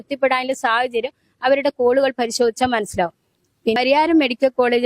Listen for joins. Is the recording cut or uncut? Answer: cut